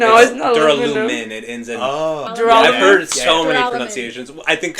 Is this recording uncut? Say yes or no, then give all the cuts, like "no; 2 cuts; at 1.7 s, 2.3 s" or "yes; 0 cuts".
no; 1 cut; at 2.3 s